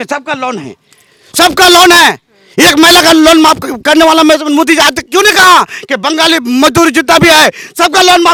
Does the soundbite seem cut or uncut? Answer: uncut